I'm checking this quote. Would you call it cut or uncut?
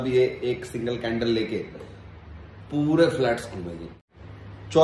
cut